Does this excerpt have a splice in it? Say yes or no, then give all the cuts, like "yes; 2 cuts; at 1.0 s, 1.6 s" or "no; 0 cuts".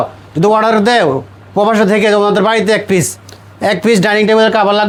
no; 0 cuts